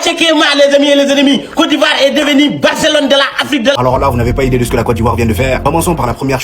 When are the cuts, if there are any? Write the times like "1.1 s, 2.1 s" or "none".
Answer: 3.8 s

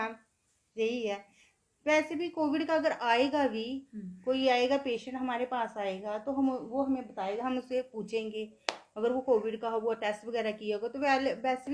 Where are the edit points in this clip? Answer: none

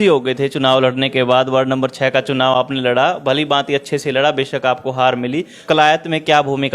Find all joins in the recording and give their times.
5.6 s

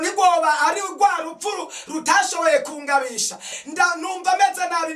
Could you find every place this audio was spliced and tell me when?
3.5 s

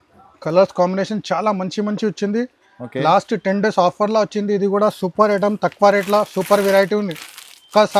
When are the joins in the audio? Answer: none

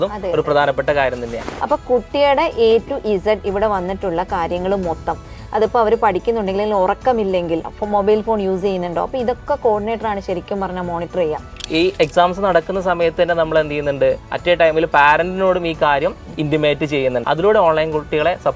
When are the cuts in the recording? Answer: 1.4 s, 7.8 s, 11.6 s, 17.2 s

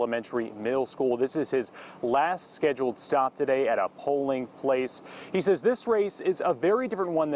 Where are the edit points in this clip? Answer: none

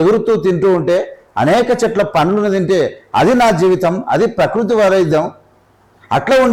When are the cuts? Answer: none

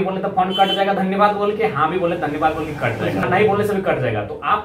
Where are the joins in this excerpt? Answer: 3.2 s

